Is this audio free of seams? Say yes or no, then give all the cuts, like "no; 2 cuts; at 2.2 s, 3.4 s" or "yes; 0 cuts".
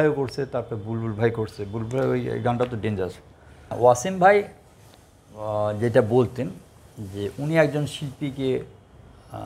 no; 1 cut; at 3.8 s